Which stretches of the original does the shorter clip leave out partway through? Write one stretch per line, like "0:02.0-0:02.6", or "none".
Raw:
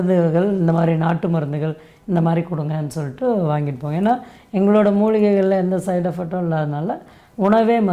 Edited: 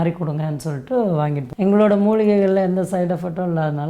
0:03.7-0:04.4